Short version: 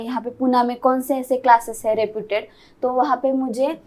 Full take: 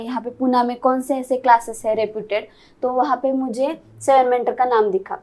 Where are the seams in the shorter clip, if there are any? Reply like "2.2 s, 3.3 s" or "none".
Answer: none